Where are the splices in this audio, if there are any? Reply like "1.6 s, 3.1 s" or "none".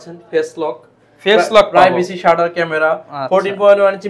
none

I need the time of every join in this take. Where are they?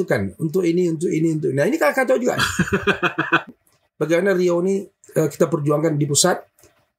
3.5 s

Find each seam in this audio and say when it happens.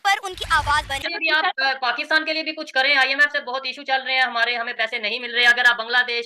1.1 s

